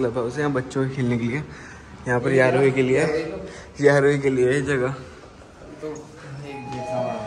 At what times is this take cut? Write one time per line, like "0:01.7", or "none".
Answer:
none